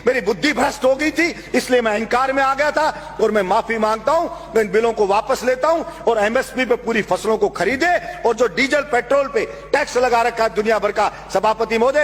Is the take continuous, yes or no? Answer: yes